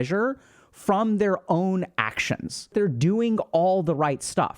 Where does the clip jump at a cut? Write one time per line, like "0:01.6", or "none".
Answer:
0:02.7